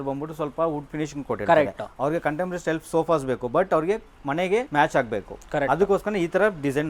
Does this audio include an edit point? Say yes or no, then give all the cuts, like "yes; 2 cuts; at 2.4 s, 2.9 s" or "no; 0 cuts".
no; 0 cuts